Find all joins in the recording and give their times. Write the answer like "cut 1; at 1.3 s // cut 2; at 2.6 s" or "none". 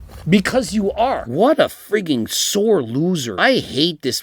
cut 1; at 1.2 s // cut 2; at 3.3 s